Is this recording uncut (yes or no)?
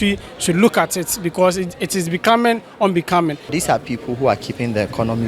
no